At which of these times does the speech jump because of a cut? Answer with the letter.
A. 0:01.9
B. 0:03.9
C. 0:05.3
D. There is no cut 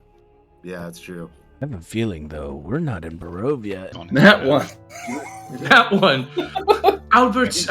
B